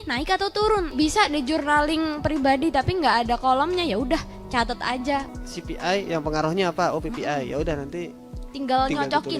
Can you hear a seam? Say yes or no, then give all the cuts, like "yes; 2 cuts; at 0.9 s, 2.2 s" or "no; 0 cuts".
yes; 2 cuts; at 0.9 s, 5.3 s